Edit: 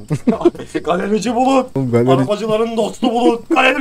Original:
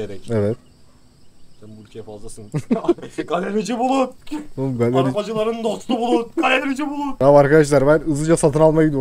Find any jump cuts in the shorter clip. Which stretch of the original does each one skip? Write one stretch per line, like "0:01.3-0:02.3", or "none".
0:04.2-0:04.6